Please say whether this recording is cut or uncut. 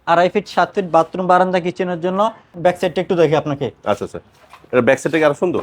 cut